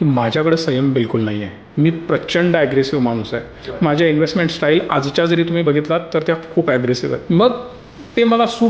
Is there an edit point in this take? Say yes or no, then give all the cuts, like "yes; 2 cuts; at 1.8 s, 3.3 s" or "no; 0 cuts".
yes; 2 cuts; at 3.6 s, 7.2 s